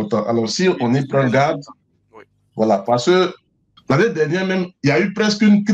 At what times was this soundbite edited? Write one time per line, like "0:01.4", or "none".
0:03.7

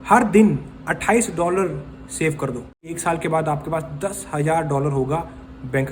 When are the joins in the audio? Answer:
0:02.9

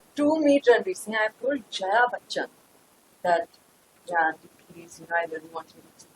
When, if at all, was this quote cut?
none

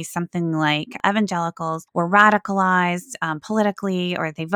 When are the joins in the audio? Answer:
0:00.9
0:01.8

